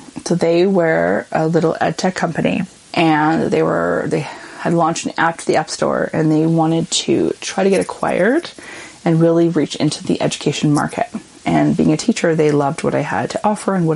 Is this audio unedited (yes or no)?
yes